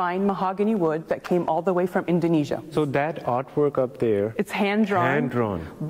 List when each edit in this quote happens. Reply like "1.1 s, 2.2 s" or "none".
1.0 s, 2.7 s, 4.3 s